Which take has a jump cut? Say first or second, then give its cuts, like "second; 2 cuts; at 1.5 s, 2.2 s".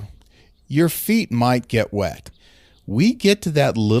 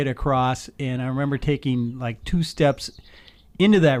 first; 1 cut; at 2.3 s